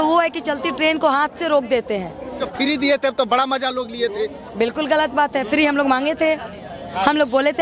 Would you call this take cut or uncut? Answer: cut